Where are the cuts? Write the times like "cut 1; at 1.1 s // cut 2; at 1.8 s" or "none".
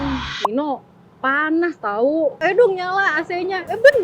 cut 1; at 2.4 s